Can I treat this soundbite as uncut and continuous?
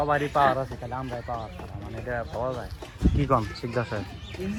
yes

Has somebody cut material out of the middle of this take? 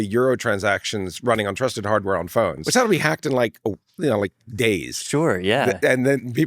yes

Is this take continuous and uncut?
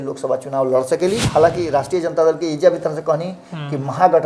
no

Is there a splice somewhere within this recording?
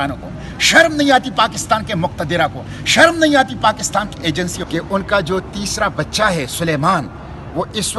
yes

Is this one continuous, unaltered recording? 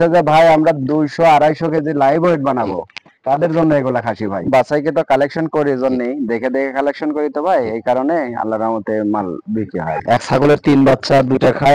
no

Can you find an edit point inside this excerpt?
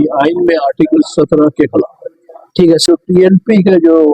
yes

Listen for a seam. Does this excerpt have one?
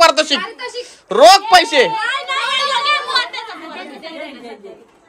no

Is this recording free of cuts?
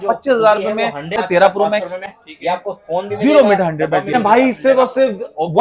no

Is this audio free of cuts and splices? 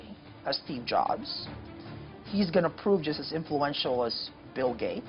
yes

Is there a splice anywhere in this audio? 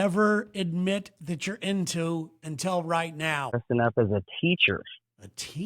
yes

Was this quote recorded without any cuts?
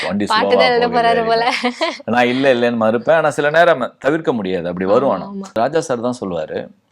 no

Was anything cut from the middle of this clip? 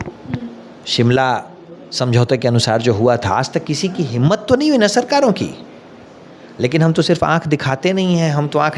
no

